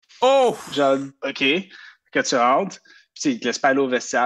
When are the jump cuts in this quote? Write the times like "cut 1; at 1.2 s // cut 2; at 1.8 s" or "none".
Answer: cut 1; at 1.1 s